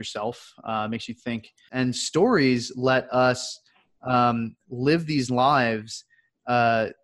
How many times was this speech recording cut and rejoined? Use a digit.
1